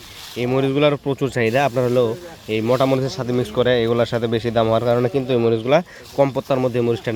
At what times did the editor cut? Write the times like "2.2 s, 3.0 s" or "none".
none